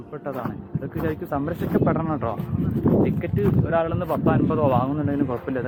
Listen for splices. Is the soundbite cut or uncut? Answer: uncut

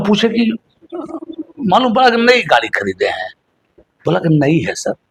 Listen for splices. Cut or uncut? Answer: uncut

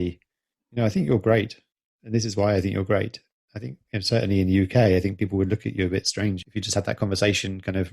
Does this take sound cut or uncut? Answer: cut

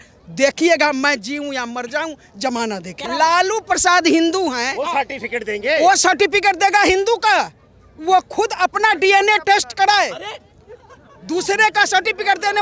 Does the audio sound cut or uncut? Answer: cut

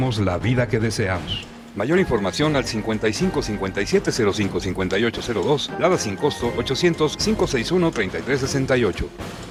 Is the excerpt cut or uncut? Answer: uncut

